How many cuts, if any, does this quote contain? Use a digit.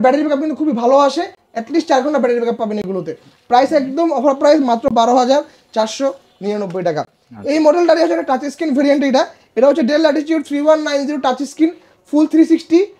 0